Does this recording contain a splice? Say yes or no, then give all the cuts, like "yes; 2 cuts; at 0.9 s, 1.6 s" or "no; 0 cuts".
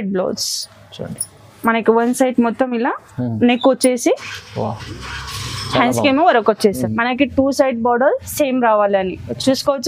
yes; 1 cut; at 6.8 s